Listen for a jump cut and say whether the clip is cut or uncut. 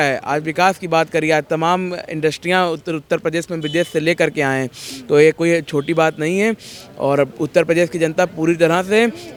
uncut